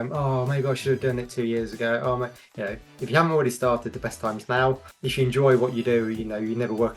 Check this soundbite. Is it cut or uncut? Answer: cut